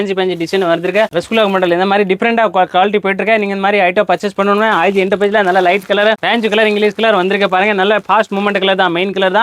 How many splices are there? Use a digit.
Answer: 0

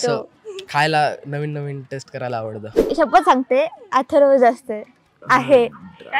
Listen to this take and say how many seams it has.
1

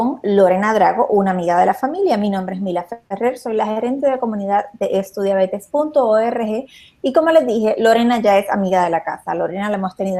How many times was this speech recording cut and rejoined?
0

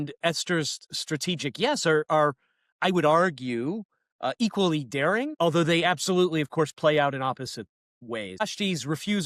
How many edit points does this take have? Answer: 2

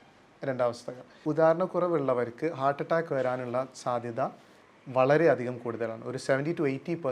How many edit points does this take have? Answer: 1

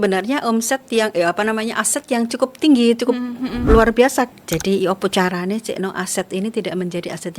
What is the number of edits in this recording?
1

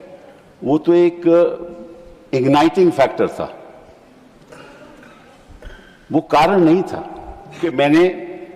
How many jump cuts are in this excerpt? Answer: 1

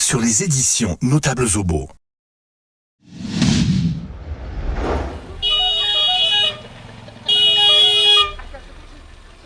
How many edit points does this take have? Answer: 0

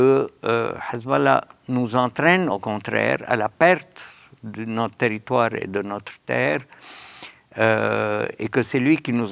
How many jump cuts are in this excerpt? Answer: 0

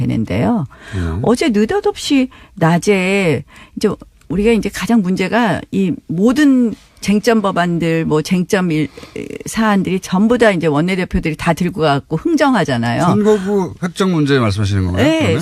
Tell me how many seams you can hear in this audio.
1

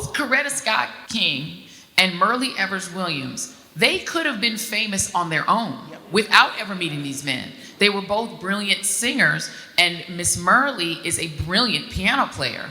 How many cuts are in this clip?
1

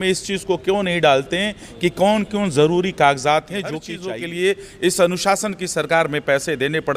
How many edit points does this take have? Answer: 1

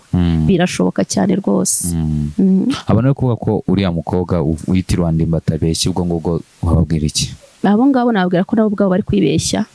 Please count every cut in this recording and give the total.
1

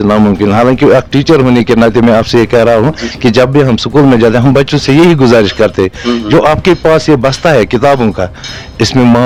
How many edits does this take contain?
0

